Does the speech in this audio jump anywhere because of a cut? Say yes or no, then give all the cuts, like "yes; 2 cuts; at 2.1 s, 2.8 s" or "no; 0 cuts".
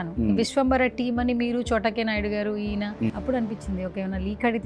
yes; 1 cut; at 3.1 s